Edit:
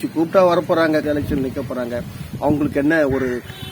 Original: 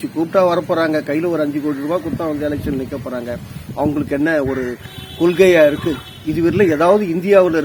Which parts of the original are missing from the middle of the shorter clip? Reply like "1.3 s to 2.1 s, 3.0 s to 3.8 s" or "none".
1.0 s to 2.4 s